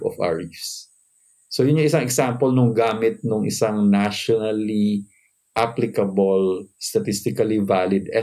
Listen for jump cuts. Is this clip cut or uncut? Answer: uncut